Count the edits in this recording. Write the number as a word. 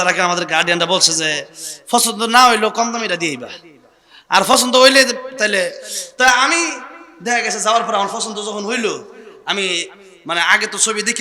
zero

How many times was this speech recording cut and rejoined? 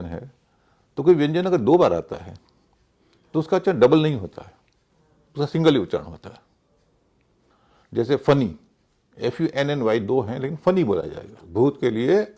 one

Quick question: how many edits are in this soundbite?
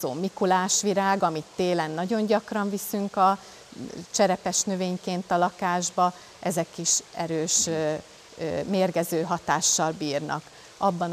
zero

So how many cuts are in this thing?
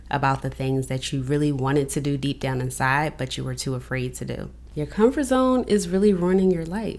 one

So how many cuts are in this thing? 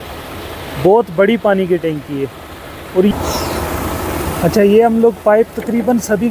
one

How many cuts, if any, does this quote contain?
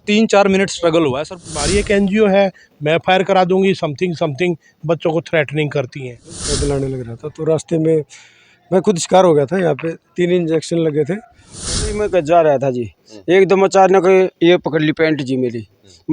three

